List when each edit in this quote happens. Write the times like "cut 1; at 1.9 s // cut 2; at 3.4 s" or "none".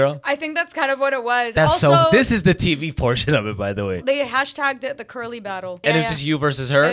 cut 1; at 4.0 s // cut 2; at 5.8 s